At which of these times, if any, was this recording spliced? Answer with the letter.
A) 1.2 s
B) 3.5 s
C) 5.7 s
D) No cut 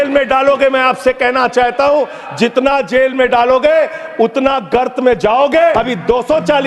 C